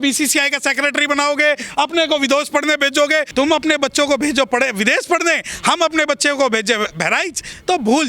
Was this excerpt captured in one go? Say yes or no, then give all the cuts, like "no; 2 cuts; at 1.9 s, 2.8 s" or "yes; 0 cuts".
no; 1 cut; at 3.3 s